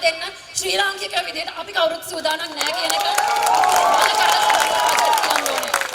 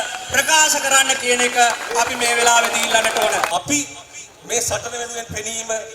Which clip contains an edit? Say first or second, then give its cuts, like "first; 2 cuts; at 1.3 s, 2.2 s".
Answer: second; 1 cut; at 3.5 s